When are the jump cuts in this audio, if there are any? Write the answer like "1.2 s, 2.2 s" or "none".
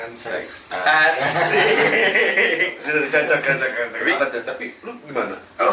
4.1 s